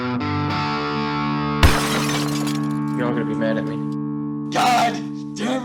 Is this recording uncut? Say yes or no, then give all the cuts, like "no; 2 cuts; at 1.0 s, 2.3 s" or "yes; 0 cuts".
yes; 0 cuts